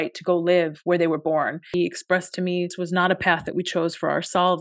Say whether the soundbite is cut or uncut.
cut